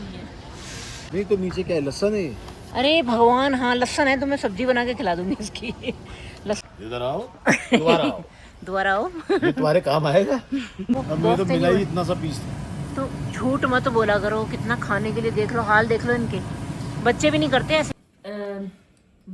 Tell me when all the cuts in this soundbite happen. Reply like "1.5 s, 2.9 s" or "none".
1.0 s, 6.6 s, 11.0 s, 18.6 s